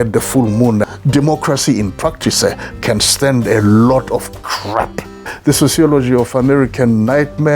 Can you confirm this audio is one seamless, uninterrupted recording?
no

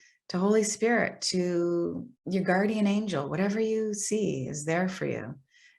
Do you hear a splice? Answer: yes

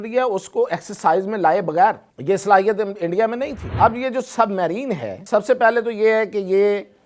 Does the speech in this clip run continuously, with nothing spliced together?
no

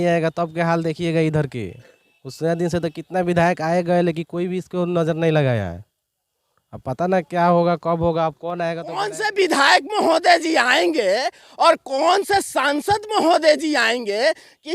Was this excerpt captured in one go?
no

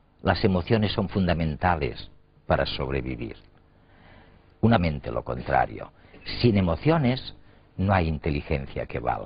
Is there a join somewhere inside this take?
no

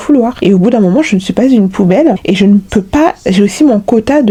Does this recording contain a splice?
no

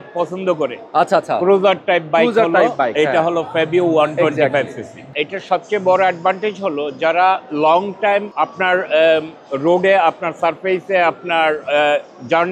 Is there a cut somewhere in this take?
yes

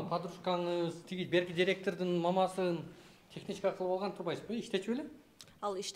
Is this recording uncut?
yes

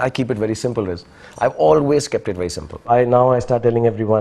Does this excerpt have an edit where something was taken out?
yes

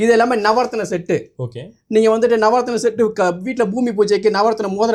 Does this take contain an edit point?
no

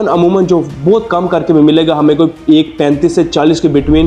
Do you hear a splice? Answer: no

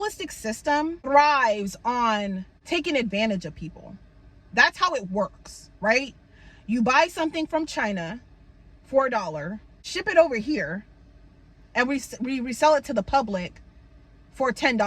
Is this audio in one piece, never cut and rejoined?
no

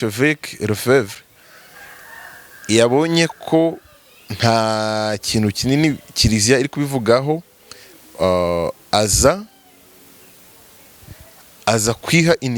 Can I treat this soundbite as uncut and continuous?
yes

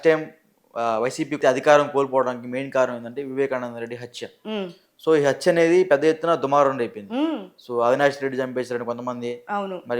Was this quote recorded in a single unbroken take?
no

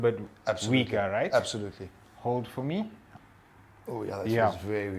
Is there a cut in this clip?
yes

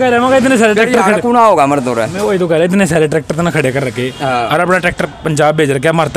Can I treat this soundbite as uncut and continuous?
yes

